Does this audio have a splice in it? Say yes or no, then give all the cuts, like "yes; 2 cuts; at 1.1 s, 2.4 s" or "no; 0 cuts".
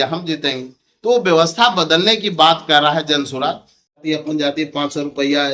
yes; 1 cut; at 4.0 s